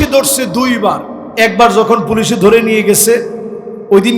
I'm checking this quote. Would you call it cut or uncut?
cut